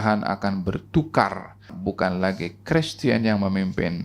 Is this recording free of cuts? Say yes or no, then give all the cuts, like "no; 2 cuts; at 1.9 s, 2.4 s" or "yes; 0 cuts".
no; 1 cut; at 1.7 s